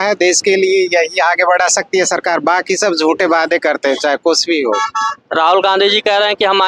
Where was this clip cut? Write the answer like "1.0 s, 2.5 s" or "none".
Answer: none

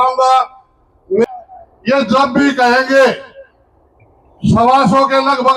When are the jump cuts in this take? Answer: 1.2 s

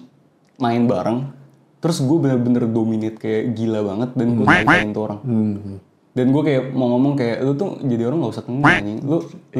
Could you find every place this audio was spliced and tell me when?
none

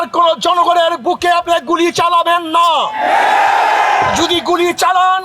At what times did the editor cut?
none

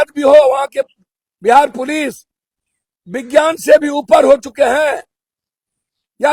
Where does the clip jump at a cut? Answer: none

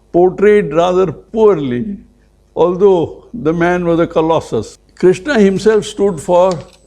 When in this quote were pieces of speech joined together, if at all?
4.7 s

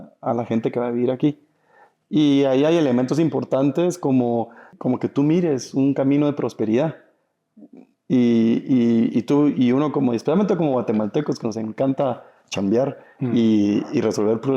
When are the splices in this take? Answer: 4.7 s

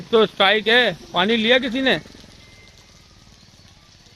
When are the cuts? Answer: none

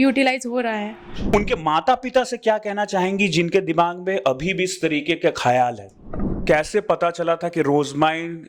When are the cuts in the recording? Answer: 1.3 s, 6.3 s

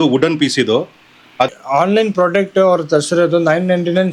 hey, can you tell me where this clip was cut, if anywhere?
1.5 s

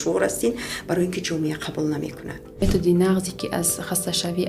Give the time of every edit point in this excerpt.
2.5 s

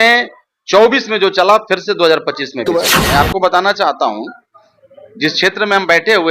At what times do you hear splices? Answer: 3.0 s

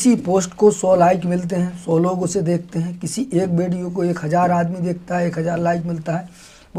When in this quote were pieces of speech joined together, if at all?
none

